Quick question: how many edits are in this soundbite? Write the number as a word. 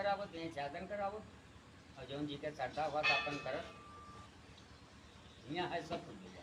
zero